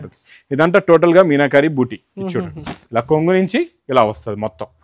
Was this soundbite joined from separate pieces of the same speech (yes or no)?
no